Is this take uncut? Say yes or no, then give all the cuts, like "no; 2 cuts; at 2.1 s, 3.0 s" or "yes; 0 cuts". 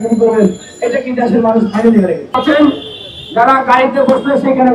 no; 1 cut; at 2.3 s